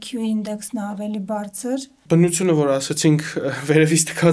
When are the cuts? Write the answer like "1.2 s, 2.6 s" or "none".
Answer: 2.0 s